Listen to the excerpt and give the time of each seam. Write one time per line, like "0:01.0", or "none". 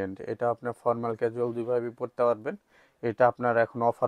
none